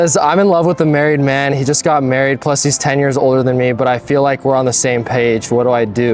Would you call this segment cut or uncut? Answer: uncut